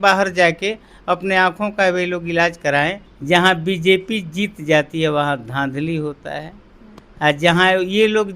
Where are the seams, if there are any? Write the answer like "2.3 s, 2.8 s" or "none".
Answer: 3.1 s